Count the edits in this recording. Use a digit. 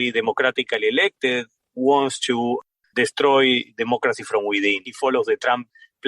2